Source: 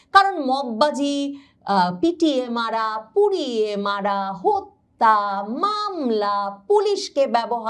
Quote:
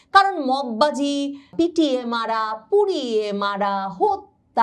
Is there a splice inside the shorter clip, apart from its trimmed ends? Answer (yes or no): yes